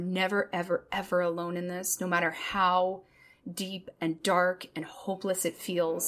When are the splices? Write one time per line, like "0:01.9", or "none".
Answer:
none